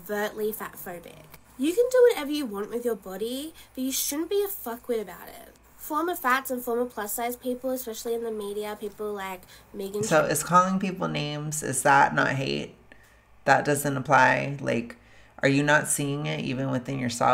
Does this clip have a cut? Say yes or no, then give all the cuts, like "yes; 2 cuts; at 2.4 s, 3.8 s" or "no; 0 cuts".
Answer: no; 0 cuts